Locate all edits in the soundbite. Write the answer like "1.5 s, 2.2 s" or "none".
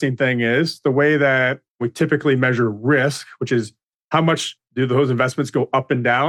3.9 s